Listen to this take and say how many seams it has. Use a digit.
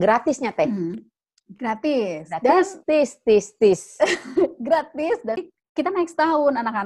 1